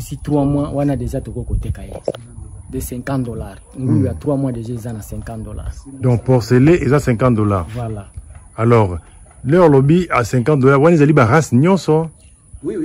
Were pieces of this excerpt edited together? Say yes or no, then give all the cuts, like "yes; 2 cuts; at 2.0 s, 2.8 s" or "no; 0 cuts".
no; 0 cuts